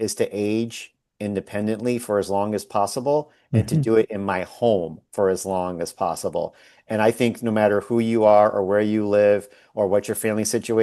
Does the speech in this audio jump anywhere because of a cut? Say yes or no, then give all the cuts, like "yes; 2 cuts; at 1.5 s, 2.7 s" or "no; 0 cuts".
no; 0 cuts